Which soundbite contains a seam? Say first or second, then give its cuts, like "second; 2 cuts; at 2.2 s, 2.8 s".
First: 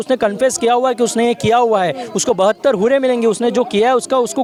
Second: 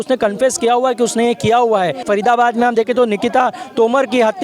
second; 1 cut; at 2.0 s